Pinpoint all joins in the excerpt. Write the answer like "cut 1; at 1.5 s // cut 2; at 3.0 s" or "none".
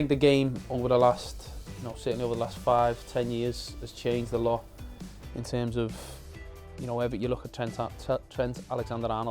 none